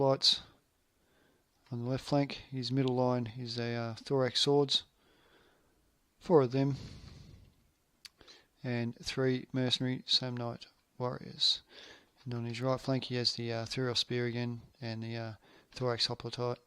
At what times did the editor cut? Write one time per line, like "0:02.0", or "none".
0:04.9